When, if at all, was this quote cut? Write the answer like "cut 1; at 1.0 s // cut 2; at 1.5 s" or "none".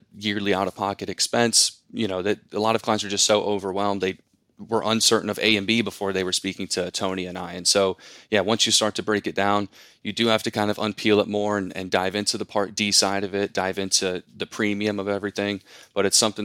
none